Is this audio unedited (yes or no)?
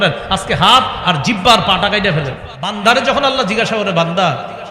no